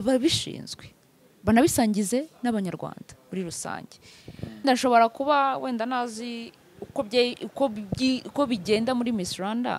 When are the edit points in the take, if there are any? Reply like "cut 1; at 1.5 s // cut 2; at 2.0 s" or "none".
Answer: cut 1; at 4.6 s